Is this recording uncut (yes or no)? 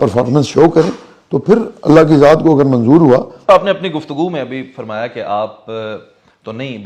no